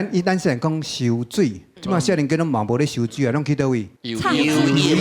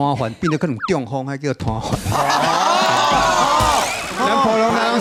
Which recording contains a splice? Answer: first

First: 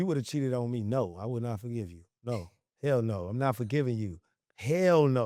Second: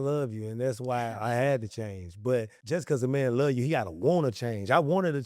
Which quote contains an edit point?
second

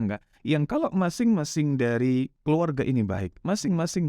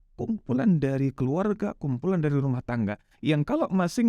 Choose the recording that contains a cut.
first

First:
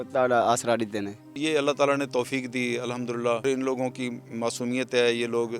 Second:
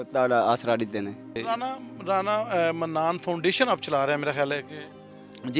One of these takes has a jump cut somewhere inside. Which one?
first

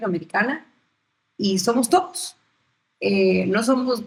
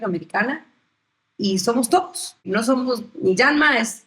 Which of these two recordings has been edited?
second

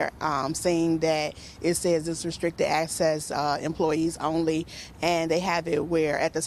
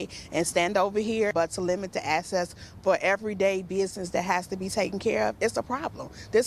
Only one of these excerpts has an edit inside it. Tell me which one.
second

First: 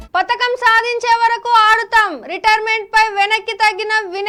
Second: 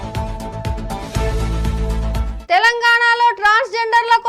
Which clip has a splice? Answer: second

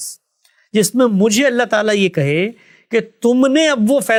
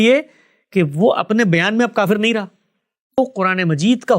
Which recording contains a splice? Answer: second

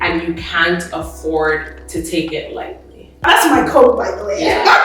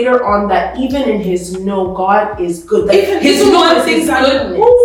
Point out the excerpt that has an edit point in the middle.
first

